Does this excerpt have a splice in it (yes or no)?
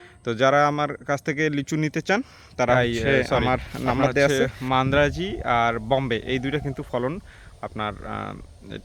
yes